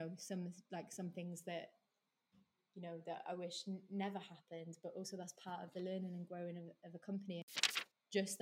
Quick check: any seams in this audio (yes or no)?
yes